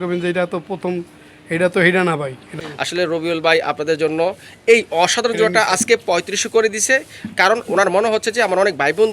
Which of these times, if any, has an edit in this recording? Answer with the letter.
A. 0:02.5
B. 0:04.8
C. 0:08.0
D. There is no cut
A